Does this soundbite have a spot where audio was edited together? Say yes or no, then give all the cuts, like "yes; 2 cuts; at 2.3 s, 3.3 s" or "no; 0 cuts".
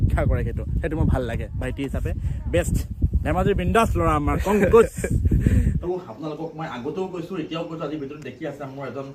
yes; 1 cut; at 5.8 s